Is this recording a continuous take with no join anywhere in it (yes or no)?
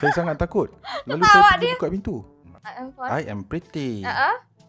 no